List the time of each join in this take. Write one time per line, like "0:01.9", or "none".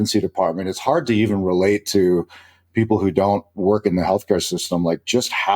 none